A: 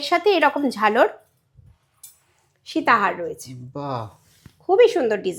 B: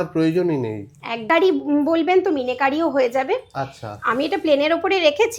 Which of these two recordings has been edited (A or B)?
B